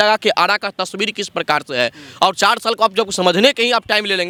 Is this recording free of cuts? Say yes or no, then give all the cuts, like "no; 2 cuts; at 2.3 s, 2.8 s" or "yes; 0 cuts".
yes; 0 cuts